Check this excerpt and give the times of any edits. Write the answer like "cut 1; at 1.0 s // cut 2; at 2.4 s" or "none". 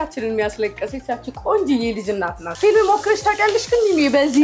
cut 1; at 2.4 s